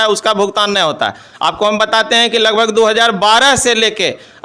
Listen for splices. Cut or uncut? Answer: uncut